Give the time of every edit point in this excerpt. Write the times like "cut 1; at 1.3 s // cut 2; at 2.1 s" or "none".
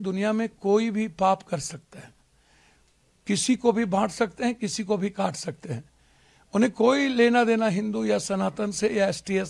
none